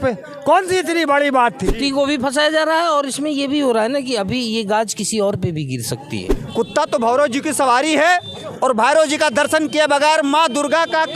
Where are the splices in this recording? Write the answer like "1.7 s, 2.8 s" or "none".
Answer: 1.7 s, 6.3 s